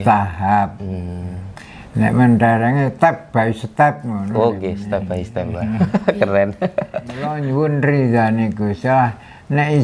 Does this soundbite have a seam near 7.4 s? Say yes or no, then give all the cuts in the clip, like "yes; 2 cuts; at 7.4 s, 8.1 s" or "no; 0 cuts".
yes; 1 cut; at 7.4 s